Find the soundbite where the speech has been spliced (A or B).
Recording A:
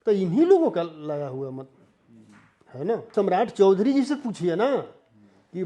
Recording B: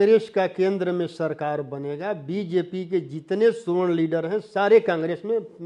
A